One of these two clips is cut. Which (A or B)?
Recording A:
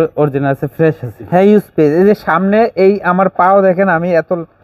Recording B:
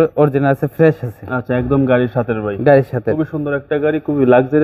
A